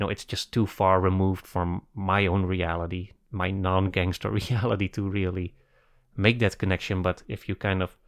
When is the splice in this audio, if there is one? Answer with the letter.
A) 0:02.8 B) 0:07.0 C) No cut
C